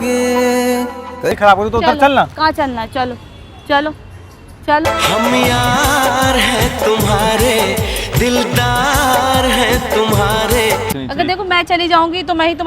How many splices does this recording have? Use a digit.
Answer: 2